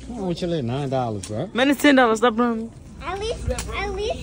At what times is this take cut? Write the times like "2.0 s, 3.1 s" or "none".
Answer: 2.9 s

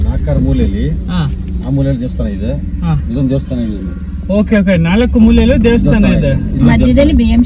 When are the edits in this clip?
none

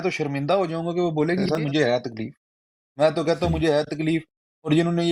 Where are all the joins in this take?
1.5 s

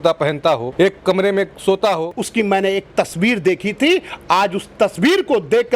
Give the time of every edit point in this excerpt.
2.2 s

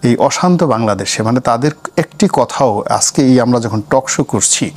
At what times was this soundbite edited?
none

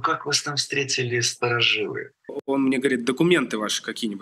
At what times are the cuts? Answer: 2.4 s

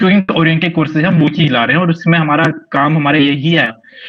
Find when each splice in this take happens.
none

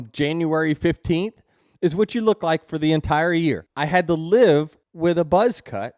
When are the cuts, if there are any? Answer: 3.7 s, 4.8 s

